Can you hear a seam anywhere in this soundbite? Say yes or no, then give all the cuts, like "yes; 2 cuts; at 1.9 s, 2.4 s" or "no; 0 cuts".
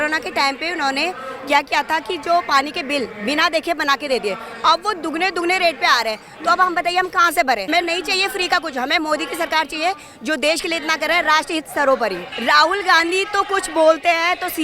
yes; 2 cuts; at 7.7 s, 12.3 s